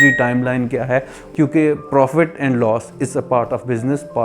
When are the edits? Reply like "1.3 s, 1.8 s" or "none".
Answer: 1.2 s

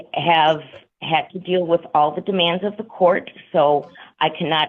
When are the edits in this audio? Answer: none

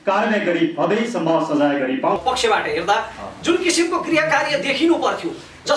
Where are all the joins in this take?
2.2 s

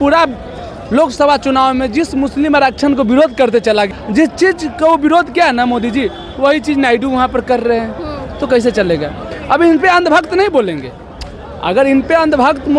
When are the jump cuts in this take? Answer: 3.9 s

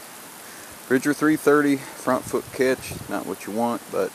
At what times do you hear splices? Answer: 2.6 s

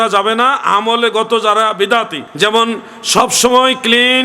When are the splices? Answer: 2.2 s

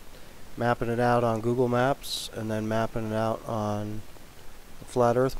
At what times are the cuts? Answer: 1.7 s

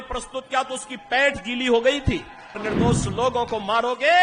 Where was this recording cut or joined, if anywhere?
2.6 s

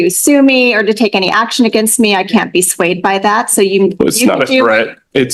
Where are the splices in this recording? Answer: none

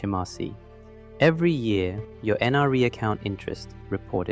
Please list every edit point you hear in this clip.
none

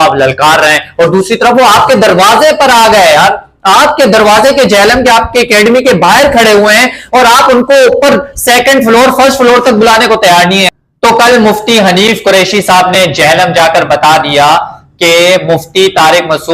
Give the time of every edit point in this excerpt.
10.7 s

